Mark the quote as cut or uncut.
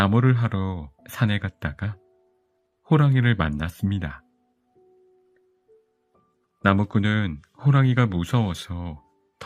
cut